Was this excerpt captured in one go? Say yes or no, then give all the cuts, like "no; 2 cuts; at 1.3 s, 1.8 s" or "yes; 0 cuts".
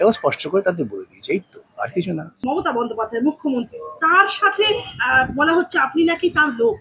no; 1 cut; at 2.5 s